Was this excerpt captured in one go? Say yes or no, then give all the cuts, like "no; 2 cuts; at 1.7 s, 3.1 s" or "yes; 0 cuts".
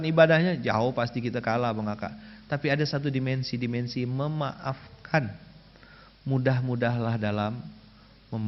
yes; 0 cuts